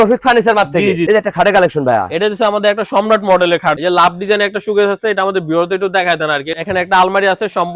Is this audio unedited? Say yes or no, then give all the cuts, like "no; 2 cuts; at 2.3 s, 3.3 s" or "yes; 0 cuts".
no; 3 cuts; at 1.0 s, 3.8 s, 6.5 s